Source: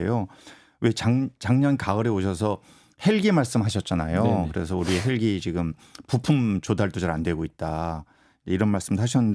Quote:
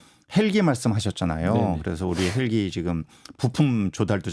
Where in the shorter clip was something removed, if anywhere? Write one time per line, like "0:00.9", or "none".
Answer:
none